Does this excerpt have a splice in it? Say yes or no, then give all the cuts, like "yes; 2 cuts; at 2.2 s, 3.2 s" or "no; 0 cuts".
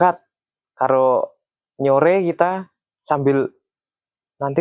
no; 0 cuts